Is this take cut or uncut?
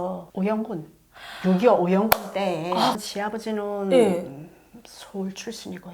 cut